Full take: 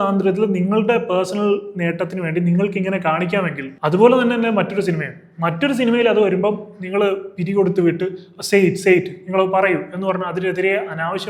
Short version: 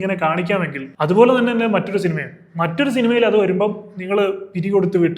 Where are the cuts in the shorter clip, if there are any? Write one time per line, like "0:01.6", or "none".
none

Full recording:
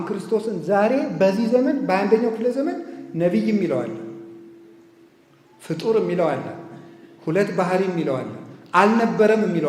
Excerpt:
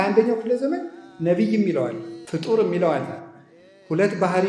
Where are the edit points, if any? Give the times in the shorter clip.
0:02.1

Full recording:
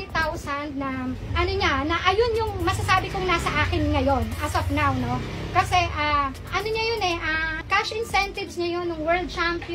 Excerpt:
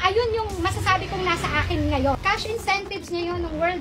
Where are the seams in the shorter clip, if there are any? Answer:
0:02.2

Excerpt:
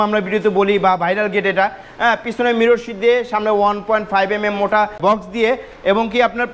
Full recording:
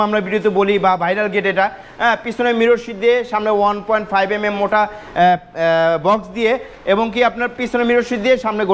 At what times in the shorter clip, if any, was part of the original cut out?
0:05.0

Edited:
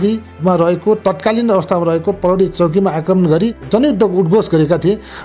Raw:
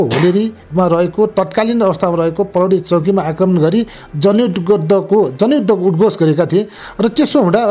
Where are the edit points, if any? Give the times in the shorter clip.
0:03.6

